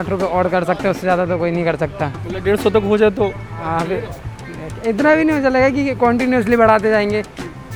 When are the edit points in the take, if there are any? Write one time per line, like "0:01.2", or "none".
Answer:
none